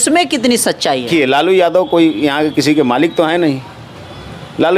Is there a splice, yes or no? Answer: yes